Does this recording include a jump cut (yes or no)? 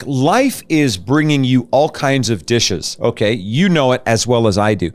no